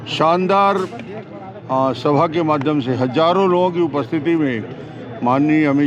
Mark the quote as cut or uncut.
uncut